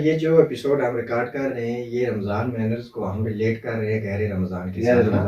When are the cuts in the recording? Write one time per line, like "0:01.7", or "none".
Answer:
none

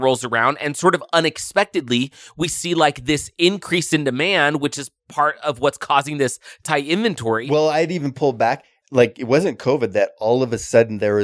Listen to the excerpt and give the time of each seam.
0:08.0

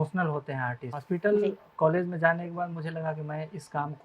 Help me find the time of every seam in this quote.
0:00.9

